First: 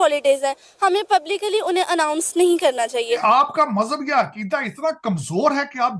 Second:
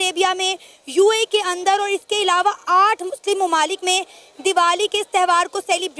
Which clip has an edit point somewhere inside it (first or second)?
first